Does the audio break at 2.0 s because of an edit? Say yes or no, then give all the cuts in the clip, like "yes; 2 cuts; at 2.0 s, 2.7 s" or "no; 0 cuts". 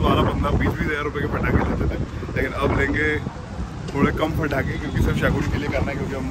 no; 0 cuts